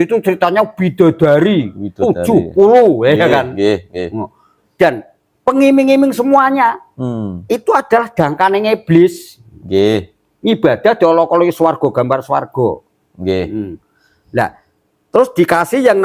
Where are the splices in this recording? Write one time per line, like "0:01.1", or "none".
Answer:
none